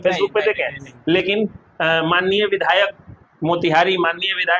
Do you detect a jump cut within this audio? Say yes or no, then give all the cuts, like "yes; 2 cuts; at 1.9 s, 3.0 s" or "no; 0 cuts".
no; 0 cuts